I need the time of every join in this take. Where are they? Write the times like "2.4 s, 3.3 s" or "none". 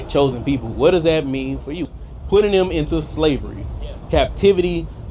1.8 s